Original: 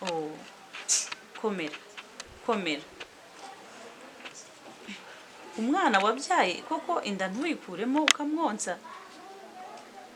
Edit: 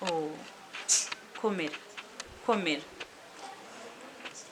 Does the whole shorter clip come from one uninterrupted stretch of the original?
yes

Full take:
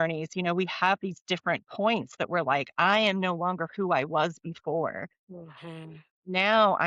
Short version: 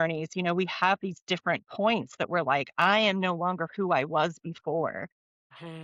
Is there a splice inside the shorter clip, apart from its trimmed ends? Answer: no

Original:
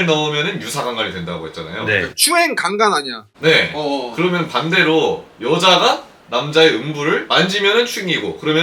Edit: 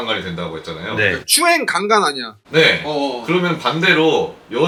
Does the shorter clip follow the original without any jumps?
yes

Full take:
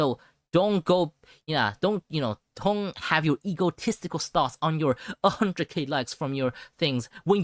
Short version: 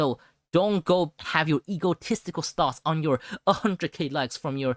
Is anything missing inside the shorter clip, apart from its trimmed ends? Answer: yes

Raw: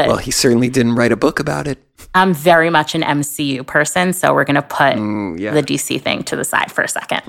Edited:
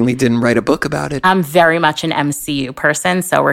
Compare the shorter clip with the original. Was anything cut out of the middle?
yes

